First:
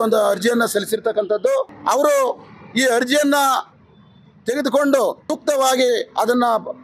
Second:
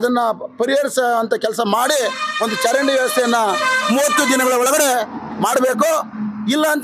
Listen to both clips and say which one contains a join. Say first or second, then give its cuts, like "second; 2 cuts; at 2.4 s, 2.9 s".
first; 2 cuts; at 1.7 s, 5.3 s